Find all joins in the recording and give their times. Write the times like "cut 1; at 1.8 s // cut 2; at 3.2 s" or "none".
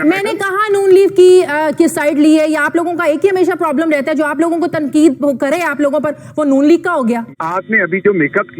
cut 1; at 7.3 s